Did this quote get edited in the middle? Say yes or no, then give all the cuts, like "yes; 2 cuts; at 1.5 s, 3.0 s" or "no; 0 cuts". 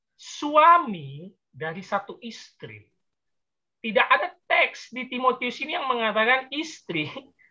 no; 0 cuts